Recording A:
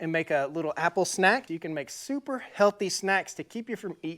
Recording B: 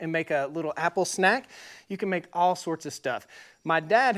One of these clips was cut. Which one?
A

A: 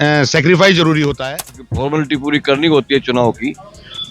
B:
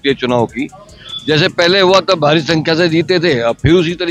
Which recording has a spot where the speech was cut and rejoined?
A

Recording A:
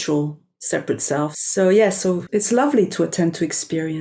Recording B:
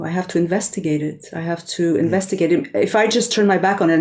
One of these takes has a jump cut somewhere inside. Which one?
A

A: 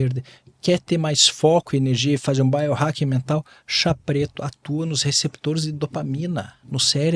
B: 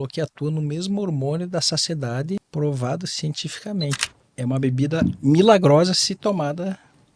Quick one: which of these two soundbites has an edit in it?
B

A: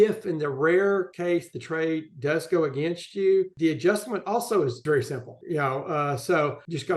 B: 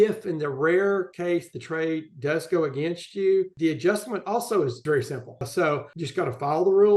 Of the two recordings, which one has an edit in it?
B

